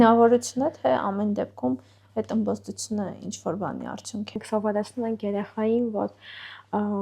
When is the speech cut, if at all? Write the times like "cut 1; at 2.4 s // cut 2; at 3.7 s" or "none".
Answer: cut 1; at 4.4 s